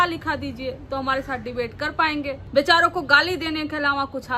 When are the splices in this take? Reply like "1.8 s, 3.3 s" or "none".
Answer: 2.4 s